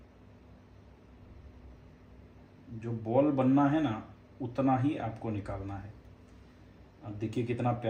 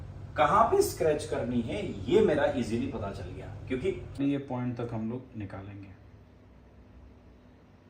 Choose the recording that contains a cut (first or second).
second